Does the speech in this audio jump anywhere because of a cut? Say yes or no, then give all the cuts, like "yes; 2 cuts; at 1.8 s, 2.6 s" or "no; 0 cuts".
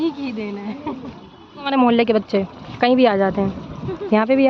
yes; 1 cut; at 1.7 s